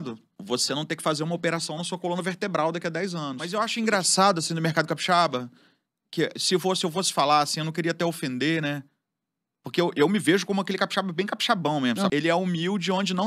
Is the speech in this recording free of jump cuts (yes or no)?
no